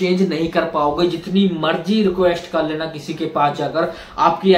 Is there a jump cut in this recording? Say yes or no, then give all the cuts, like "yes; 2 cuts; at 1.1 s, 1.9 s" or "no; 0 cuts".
no; 0 cuts